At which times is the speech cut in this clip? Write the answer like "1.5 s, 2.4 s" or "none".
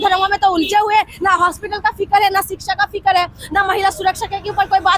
none

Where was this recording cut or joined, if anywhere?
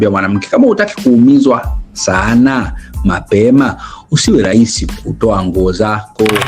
none

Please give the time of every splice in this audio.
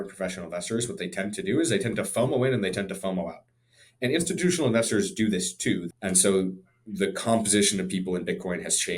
5.9 s

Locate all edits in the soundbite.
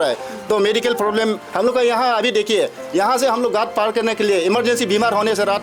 none

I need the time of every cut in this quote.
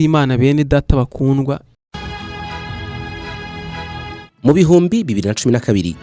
1.8 s

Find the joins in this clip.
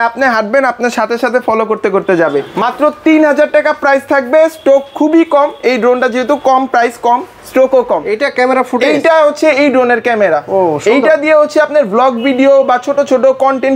2.5 s, 8.1 s

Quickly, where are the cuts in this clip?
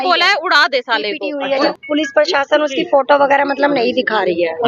1.7 s

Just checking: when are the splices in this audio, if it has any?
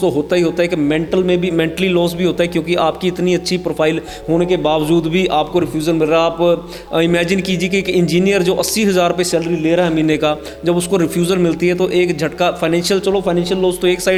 none

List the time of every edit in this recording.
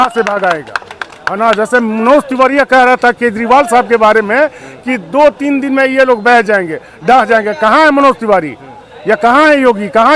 none

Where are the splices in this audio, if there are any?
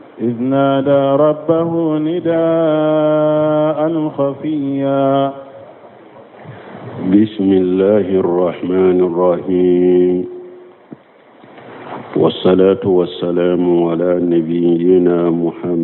none

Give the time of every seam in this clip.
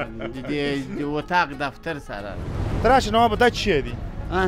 2.4 s

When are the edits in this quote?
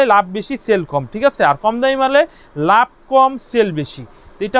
none

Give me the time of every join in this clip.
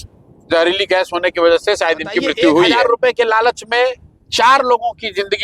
2.8 s

